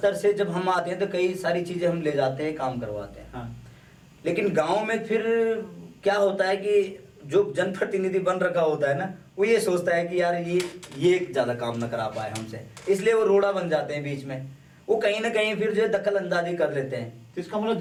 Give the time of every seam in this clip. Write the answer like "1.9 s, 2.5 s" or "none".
none